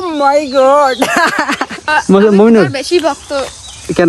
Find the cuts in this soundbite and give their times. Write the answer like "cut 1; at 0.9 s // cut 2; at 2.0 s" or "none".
cut 1; at 1.9 s